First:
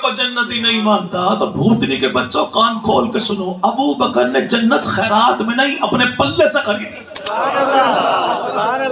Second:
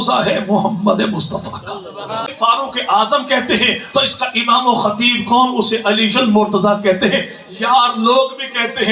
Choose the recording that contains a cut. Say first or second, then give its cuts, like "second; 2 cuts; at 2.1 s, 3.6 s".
second; 1 cut; at 2.3 s